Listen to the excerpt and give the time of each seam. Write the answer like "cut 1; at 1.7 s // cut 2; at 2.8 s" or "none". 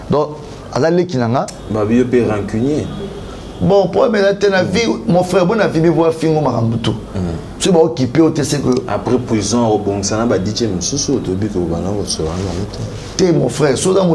cut 1; at 1.6 s